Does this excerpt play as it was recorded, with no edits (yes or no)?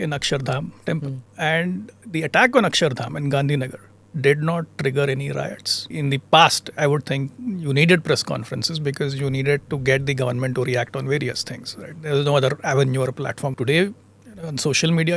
no